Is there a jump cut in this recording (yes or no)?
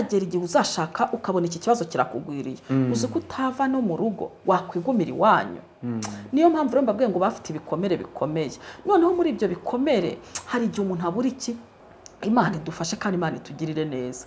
yes